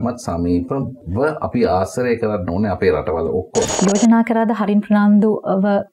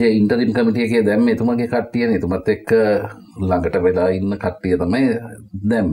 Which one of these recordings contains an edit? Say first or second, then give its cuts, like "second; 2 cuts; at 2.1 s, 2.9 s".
first; 2 cuts; at 1.0 s, 3.7 s